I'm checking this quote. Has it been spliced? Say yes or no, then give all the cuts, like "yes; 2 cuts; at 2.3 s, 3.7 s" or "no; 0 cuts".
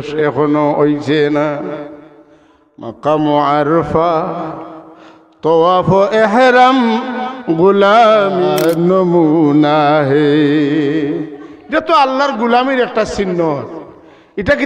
yes; 1 cut; at 8.5 s